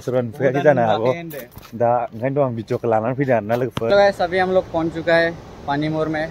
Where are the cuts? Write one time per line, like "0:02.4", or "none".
0:03.9

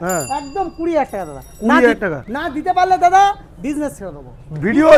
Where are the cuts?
none

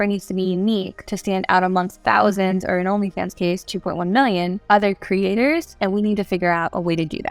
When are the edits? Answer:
0:01.0
0:01.9
0:04.6
0:05.7

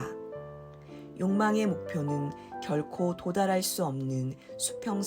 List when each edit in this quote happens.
none

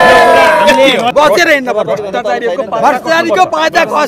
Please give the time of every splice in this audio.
0:01.1

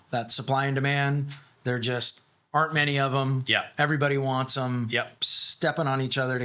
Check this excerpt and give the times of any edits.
0:05.2

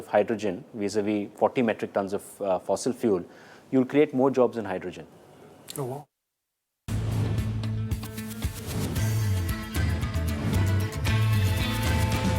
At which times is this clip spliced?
0:06.1
0:09.7

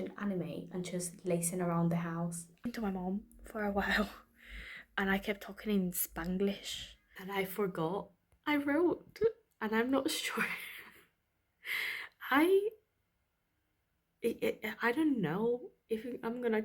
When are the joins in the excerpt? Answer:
0:02.6
0:07.2

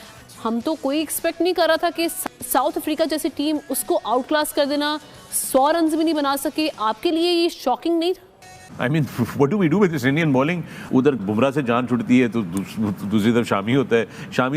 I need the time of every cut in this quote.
0:02.3
0:08.7
0:10.7

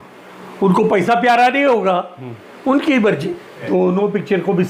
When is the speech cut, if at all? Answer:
0:03.7

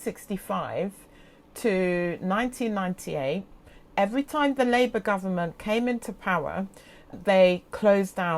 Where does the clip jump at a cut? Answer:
none

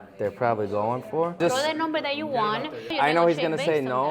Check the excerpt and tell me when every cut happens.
0:01.4
0:02.9

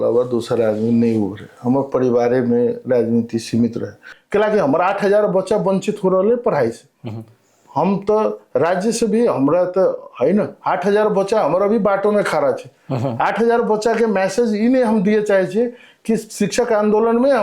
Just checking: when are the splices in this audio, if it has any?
0:04.1

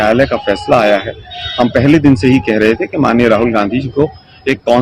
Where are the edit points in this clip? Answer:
none

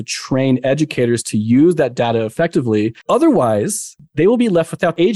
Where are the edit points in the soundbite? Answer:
0:03.0
0:04.0

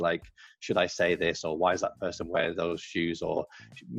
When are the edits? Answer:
none

